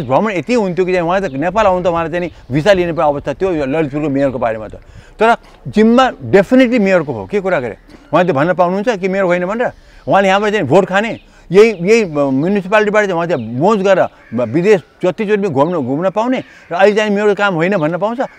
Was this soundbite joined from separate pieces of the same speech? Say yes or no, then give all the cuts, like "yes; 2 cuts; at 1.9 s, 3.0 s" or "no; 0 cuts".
no; 0 cuts